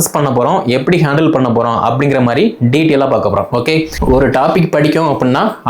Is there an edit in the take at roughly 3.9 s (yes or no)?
yes